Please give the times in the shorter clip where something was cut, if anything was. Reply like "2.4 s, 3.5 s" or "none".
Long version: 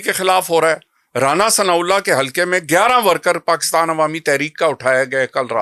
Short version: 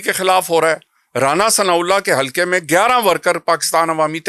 none

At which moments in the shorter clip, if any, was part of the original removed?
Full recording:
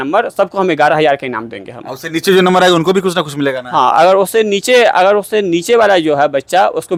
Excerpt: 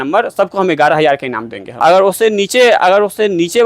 1.8 s

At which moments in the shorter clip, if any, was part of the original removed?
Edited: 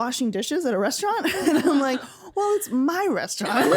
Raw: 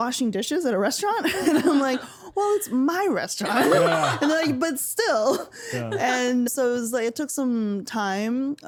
none

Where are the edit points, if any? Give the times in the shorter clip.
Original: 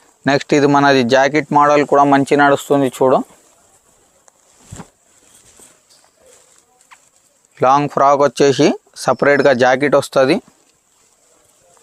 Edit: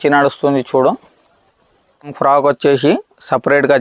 2.1 s

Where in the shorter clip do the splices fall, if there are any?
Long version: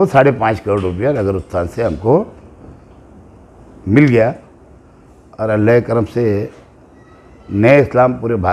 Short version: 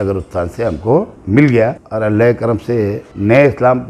1.2 s, 1.8 s, 3.1 s

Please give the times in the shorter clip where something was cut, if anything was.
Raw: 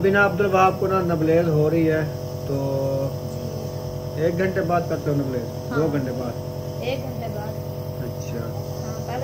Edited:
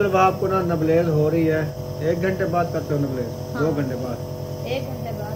1.8 s

